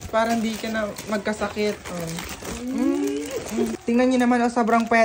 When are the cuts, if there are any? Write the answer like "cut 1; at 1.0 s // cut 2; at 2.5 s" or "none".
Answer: cut 1; at 3.7 s